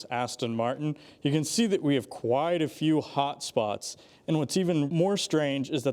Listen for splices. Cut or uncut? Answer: cut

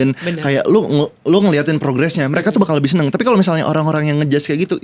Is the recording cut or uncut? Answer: uncut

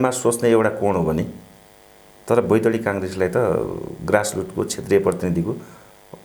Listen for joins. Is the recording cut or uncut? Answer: uncut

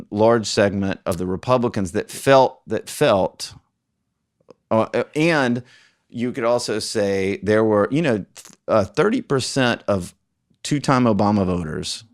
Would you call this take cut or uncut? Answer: uncut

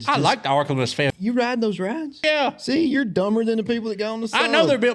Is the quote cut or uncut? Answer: cut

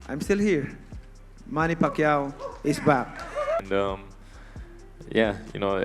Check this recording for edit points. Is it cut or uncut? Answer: cut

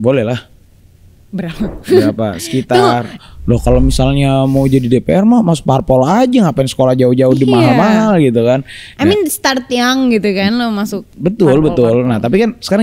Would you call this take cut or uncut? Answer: cut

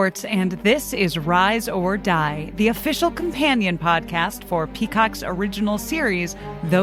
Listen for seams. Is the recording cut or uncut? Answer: uncut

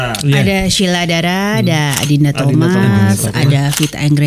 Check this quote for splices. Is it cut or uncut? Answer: uncut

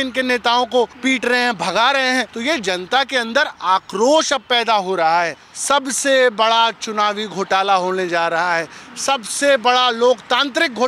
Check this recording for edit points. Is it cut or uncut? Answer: cut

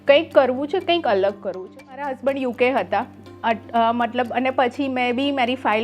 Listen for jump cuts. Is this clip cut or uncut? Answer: cut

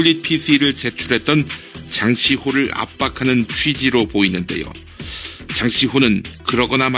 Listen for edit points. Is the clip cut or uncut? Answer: uncut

